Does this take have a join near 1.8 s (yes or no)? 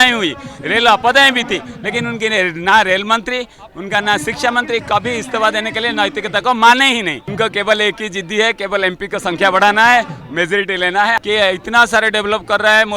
no